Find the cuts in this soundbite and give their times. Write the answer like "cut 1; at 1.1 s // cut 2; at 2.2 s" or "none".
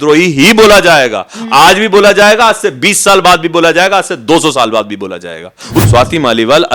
cut 1; at 5.8 s

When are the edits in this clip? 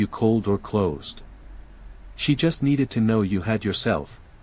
none

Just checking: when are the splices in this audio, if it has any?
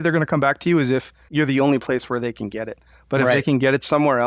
cut 1; at 1.2 s

